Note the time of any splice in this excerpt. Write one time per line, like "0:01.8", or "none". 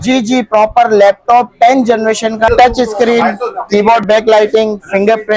0:02.5